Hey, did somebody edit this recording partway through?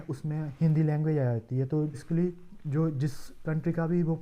yes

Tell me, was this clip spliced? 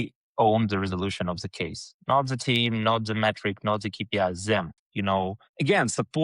yes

